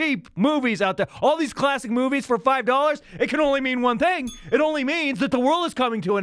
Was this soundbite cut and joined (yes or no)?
no